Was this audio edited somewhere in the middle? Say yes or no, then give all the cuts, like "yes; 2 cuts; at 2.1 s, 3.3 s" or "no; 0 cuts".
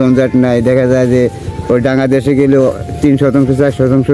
no; 0 cuts